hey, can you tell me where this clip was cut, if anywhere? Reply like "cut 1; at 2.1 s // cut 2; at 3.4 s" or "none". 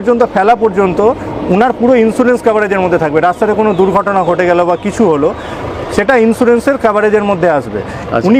none